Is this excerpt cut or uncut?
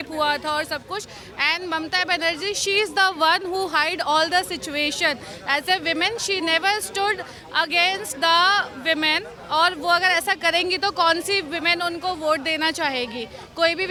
uncut